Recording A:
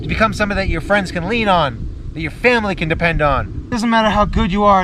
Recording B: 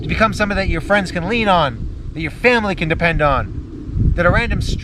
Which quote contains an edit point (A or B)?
A